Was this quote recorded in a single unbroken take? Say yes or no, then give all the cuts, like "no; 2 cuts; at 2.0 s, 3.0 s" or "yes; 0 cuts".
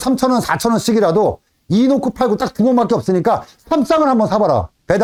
yes; 0 cuts